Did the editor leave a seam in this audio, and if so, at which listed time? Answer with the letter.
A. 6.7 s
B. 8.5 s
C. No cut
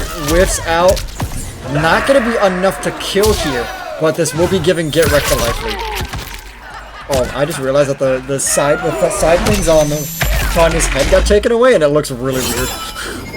A